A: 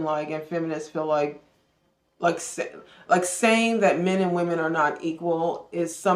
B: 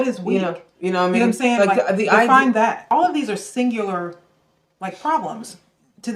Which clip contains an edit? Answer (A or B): B